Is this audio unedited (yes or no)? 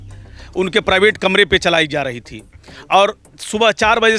yes